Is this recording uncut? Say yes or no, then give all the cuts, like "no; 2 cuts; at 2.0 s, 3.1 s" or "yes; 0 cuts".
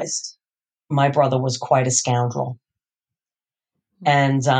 yes; 0 cuts